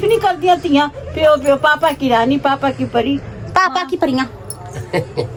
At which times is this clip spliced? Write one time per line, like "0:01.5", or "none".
none